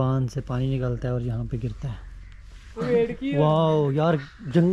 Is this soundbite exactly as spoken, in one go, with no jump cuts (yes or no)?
yes